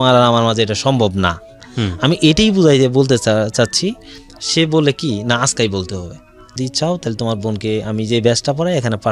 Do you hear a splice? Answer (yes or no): yes